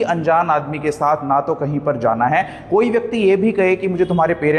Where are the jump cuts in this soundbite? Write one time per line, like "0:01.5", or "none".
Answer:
none